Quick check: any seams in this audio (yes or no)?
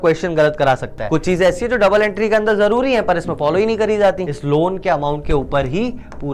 yes